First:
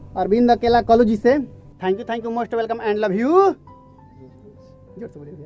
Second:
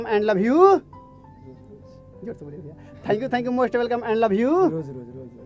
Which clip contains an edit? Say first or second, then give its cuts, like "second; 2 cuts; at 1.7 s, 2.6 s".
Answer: first; 1 cut; at 1.7 s